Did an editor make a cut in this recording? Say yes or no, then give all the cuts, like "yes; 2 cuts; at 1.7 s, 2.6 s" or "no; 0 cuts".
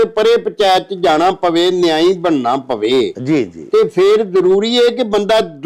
no; 0 cuts